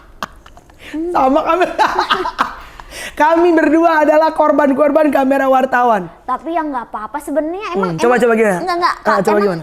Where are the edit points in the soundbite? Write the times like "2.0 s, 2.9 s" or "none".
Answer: none